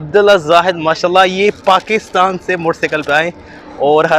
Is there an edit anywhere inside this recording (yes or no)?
no